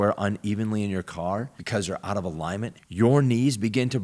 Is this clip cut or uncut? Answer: uncut